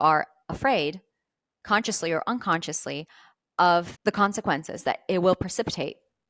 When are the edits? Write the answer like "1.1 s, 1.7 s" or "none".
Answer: 3.9 s